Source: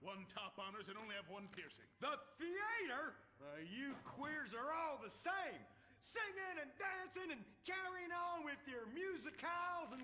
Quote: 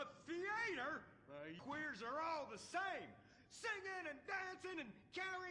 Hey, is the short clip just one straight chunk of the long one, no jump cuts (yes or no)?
no